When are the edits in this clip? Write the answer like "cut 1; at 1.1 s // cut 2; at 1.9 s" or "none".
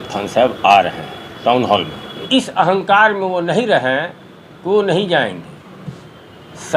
cut 1; at 2.3 s